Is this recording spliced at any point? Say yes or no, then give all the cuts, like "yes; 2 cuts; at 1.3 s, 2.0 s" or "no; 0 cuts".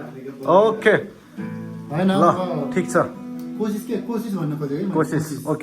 no; 0 cuts